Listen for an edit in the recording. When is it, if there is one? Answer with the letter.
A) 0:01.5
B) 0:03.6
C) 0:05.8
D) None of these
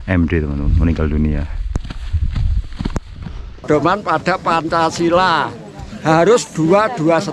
B